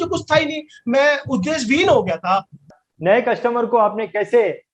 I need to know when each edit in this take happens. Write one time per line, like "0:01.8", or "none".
0:02.7